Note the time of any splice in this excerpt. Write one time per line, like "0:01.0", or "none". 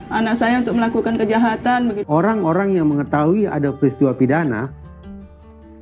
0:02.0